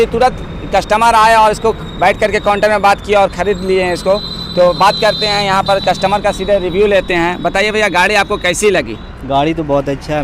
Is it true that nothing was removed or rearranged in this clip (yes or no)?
yes